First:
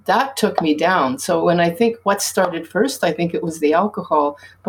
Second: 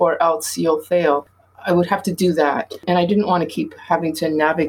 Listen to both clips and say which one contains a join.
second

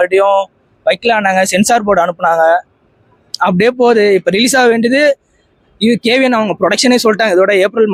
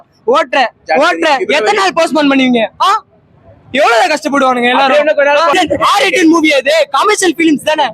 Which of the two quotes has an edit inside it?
second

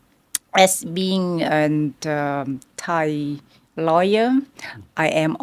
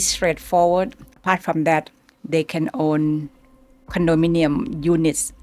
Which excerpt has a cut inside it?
second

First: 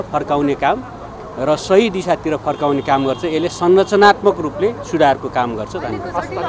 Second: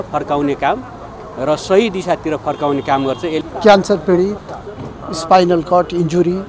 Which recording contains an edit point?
second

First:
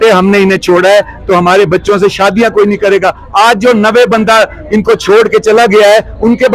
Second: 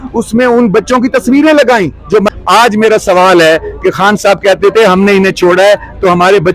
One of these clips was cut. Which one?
second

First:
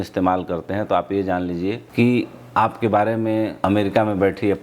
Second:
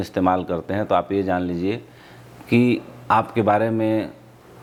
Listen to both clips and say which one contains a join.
first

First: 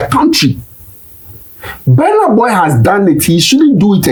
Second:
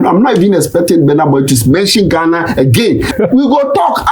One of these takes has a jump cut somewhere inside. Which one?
second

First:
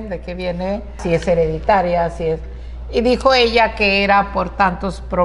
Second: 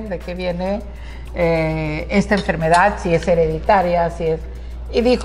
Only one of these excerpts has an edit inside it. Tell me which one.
first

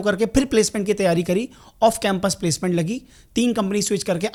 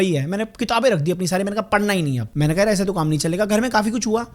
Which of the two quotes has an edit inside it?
second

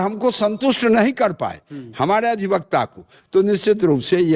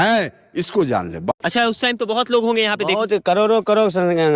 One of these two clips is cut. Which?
second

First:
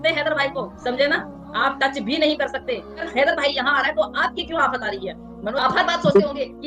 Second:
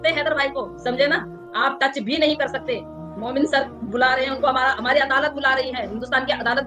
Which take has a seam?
first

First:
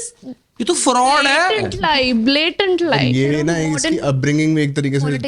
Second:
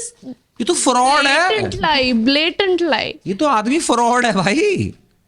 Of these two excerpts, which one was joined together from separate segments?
first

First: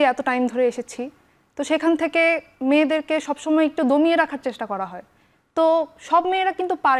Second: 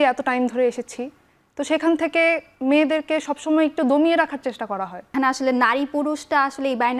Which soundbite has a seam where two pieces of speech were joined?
second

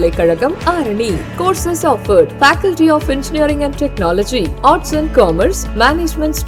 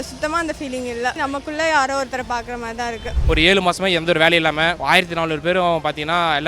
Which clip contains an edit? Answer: second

